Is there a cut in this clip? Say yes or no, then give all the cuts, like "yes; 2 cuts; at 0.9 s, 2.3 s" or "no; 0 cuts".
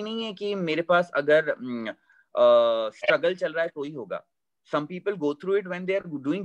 no; 0 cuts